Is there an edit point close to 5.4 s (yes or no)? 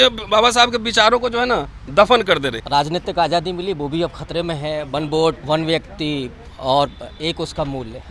yes